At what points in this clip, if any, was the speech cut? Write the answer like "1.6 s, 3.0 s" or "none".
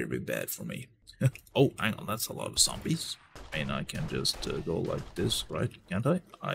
1.0 s